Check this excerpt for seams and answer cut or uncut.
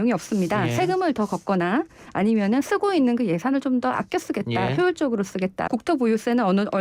cut